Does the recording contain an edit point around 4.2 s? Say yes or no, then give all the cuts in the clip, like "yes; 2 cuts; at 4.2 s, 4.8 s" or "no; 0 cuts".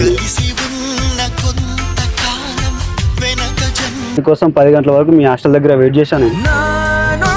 yes; 1 cut; at 4.2 s